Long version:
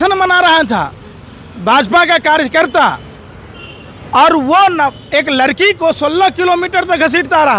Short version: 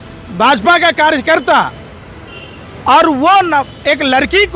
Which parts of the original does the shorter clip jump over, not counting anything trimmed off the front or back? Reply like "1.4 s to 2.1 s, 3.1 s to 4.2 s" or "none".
none

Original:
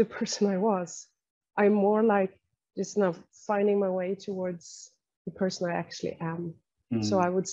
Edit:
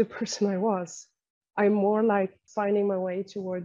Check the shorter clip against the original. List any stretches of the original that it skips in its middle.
2.4 s to 3.3 s

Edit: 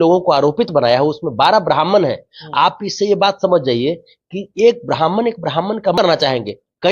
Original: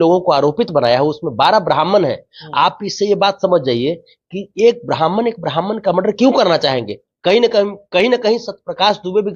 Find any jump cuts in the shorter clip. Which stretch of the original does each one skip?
6.0 s to 6.4 s

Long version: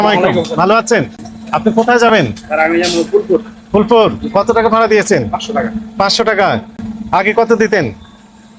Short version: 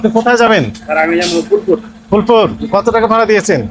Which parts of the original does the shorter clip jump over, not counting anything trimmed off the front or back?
none

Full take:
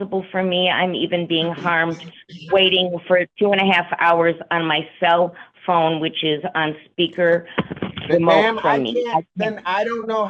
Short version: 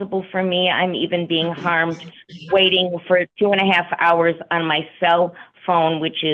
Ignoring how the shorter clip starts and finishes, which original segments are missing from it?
none

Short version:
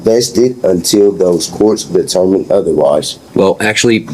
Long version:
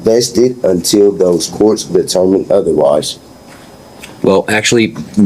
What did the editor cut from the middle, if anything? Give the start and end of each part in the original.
3.2 s to 4.1 s

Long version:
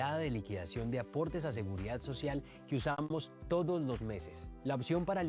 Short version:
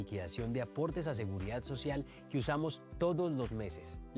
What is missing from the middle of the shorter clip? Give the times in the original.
3.0 s to 3.1 s

